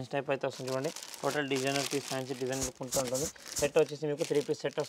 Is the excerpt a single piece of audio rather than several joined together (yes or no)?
yes